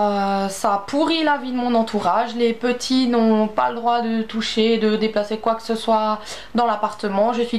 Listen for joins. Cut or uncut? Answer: uncut